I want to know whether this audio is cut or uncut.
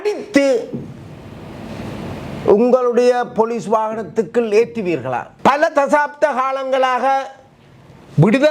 cut